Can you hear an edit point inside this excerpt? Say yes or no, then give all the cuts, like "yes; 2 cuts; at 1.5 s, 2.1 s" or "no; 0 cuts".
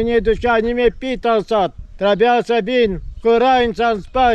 no; 0 cuts